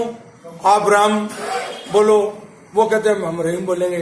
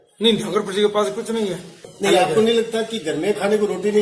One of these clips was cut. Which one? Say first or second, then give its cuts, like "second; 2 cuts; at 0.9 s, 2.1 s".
second; 1 cut; at 1.8 s